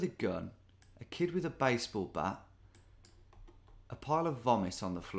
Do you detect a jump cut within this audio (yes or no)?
no